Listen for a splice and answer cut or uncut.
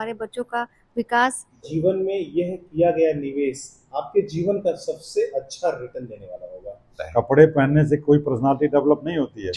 cut